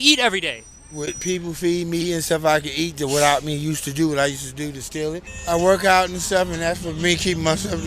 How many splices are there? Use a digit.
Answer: 1